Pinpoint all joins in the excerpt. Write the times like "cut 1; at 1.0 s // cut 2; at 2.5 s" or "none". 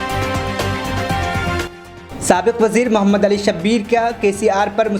cut 1; at 1.6 s